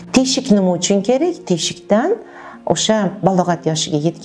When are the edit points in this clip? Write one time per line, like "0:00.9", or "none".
none